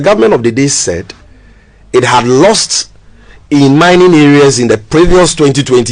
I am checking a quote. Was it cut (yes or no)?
no